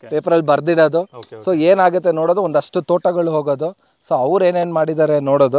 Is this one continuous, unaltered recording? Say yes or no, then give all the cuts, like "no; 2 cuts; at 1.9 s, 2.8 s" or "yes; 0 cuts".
yes; 0 cuts